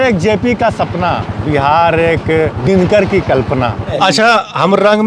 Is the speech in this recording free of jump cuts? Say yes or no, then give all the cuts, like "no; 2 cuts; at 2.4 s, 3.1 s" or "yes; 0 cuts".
no; 2 cuts; at 2.6 s, 4.0 s